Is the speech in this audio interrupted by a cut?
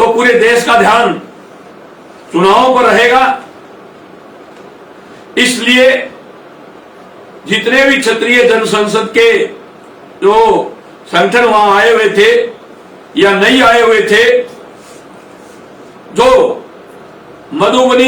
no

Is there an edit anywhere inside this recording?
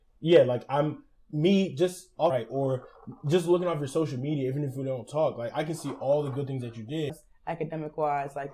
yes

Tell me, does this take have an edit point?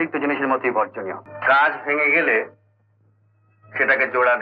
yes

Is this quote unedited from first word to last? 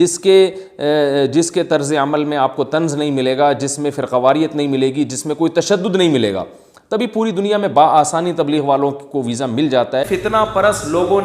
no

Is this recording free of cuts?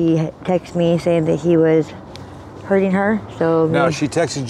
yes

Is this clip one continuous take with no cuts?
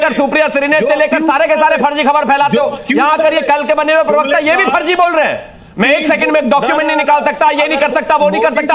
yes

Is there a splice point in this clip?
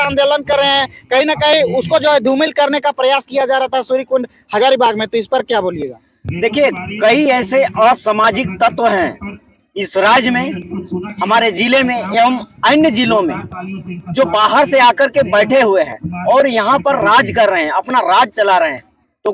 no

